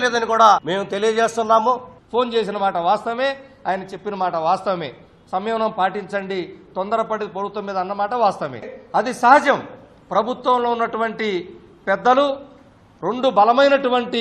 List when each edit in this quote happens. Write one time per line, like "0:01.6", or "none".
0:01.6